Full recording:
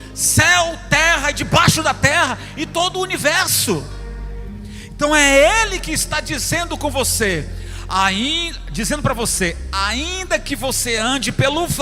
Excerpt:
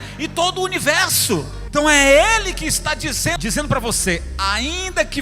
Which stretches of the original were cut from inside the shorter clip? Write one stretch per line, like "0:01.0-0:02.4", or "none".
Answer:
0:04.0-0:04.8
0:06.6-0:08.7